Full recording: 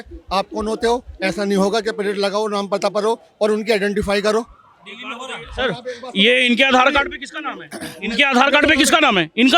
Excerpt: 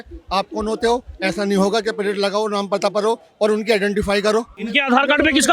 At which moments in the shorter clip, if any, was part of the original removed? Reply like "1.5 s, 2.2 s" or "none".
4.6 s